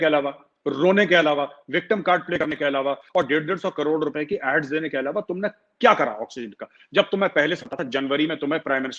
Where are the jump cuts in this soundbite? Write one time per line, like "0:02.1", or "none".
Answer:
none